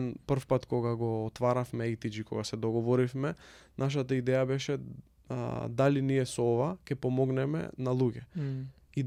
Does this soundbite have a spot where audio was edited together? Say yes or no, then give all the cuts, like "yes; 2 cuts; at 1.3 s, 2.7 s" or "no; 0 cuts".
no; 0 cuts